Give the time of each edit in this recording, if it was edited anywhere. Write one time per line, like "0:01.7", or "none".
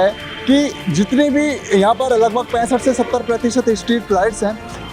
none